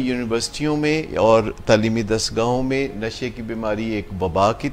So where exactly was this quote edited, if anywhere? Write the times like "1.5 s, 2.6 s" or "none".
none